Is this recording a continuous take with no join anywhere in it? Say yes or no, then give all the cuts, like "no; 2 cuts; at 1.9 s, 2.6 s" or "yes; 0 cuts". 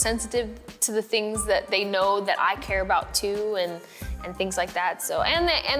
yes; 0 cuts